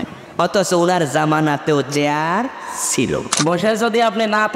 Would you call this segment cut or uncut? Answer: cut